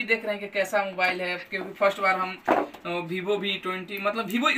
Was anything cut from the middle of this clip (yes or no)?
no